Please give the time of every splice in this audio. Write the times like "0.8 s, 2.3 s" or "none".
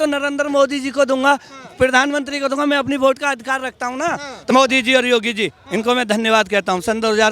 4.5 s